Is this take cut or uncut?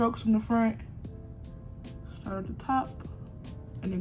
cut